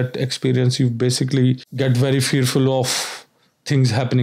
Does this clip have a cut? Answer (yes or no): yes